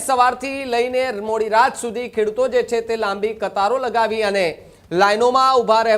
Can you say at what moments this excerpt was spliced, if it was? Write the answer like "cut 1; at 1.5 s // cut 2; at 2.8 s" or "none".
none